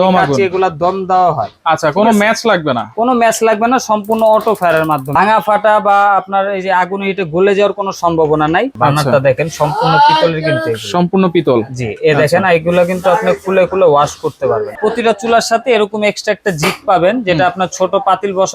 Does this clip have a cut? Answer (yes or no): yes